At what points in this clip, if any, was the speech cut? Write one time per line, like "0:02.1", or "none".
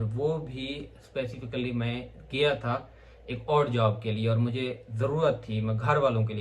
none